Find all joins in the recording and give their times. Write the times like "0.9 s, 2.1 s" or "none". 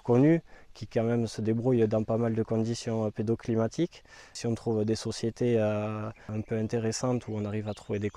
4.4 s, 6.3 s